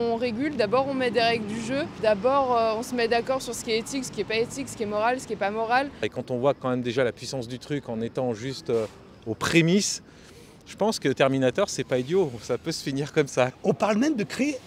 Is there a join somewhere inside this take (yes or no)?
yes